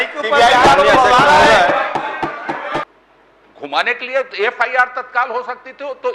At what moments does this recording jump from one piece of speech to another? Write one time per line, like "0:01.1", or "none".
0:02.8

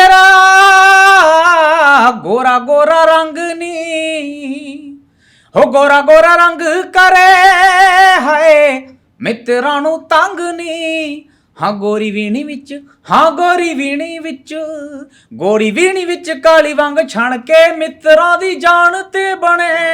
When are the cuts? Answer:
none

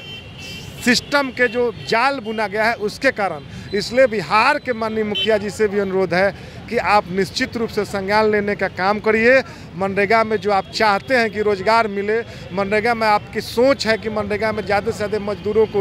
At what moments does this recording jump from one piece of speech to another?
none

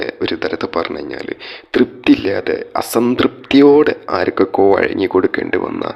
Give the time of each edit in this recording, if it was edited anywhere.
none

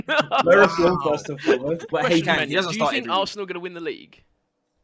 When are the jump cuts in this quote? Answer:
0:01.8

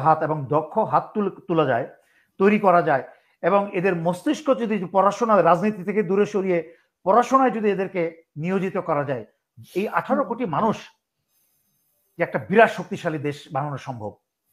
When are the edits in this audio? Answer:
none

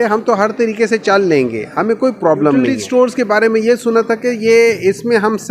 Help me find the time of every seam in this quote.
0:02.8

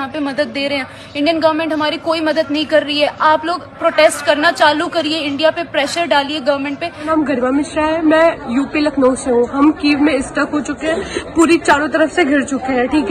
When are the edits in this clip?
0:07.0

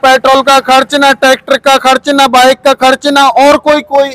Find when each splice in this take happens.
none

